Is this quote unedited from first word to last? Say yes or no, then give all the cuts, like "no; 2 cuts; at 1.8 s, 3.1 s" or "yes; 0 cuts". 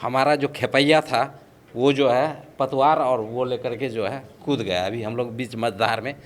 yes; 0 cuts